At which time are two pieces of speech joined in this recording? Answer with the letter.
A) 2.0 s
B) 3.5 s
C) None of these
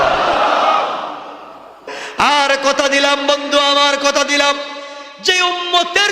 A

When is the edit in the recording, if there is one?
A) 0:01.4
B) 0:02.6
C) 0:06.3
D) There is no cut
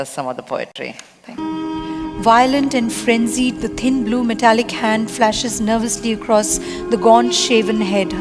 A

